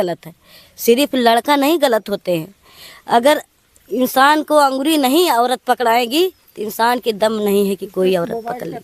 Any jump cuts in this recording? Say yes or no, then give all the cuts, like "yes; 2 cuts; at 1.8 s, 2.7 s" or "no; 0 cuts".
no; 0 cuts